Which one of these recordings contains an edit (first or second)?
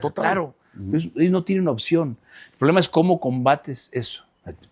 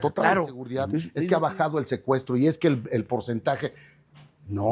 second